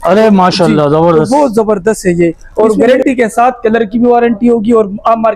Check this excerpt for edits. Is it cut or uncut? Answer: cut